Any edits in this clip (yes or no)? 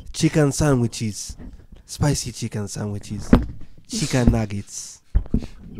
no